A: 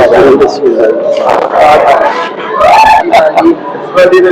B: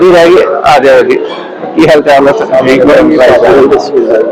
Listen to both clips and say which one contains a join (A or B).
A